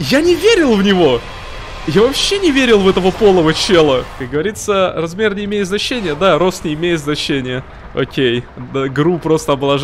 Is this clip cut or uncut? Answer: cut